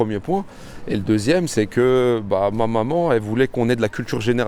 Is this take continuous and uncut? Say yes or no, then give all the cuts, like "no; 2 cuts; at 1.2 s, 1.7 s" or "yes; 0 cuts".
yes; 0 cuts